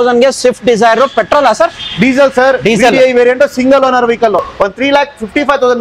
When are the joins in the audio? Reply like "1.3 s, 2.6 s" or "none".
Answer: 4.4 s